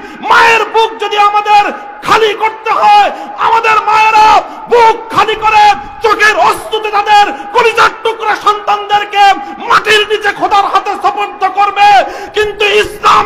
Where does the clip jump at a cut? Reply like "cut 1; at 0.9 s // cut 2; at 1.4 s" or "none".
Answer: none